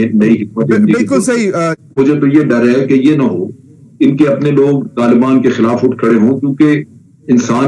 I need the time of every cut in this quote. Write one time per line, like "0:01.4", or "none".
0:01.9